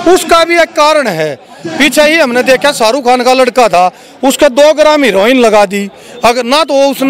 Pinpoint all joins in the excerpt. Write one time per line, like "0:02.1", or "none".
none